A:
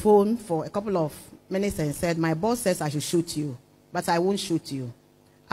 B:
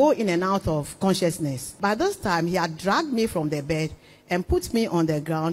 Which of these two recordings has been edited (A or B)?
B